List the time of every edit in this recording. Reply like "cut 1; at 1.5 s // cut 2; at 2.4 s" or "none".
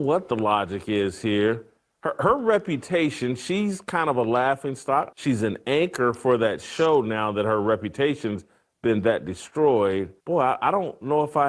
cut 1; at 5.1 s // cut 2; at 10.1 s